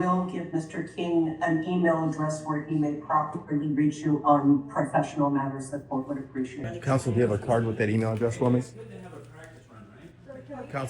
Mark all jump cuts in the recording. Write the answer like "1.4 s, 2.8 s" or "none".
6.6 s